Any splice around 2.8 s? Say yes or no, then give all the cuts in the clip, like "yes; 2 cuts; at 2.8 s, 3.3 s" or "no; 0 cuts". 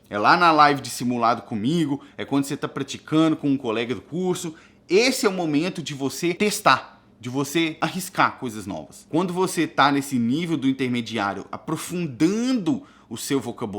no; 3 cuts; at 6.4 s, 7.8 s, 8.9 s